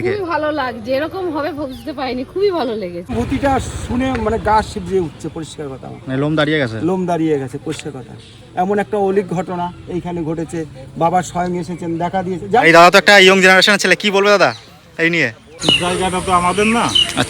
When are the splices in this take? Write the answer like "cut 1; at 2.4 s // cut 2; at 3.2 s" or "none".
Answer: cut 1; at 3.1 s // cut 2; at 12.6 s // cut 3; at 15.4 s